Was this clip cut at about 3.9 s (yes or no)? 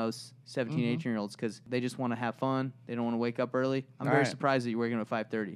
no